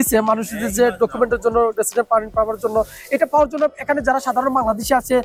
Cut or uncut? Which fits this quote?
uncut